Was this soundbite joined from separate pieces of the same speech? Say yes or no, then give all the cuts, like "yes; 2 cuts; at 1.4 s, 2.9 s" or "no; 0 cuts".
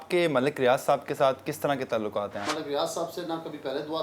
yes; 1 cut; at 2.5 s